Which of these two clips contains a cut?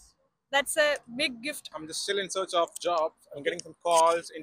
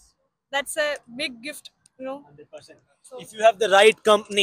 first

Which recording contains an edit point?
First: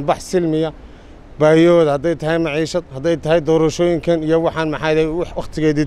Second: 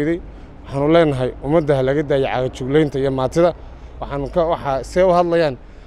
second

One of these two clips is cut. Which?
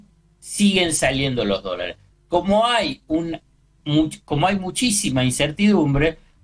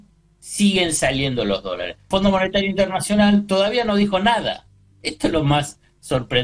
second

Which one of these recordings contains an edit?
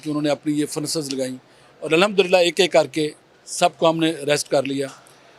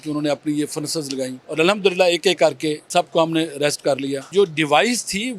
second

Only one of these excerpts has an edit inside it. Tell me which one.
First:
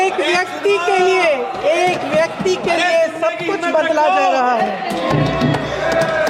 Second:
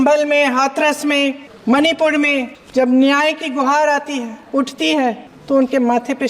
second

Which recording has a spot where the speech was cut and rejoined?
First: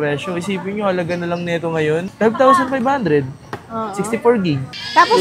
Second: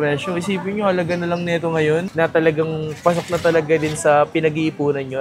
second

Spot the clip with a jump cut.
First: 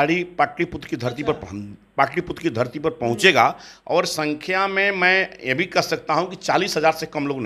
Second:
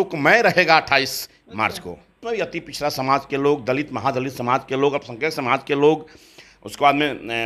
second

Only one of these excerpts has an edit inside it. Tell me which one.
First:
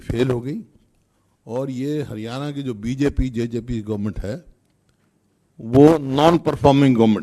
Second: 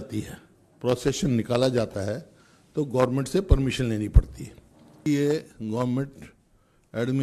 second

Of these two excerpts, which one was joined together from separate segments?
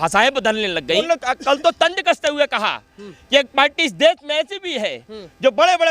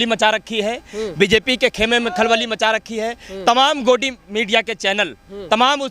first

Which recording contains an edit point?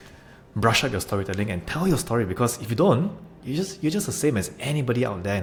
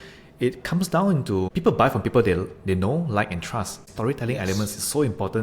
second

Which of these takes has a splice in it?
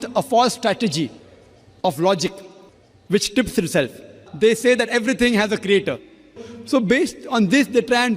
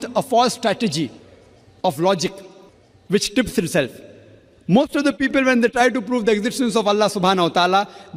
first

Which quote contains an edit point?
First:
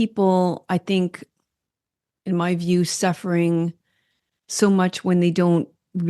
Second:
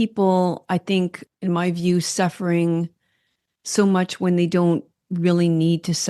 second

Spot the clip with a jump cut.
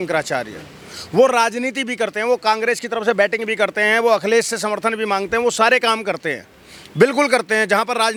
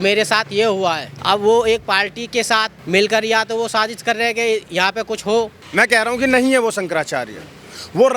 second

